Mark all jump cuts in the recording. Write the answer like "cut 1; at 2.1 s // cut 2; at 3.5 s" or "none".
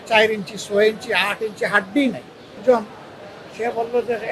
cut 1; at 2.6 s